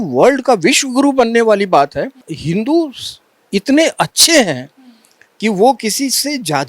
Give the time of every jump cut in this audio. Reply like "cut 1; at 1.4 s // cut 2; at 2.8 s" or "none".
cut 1; at 2.3 s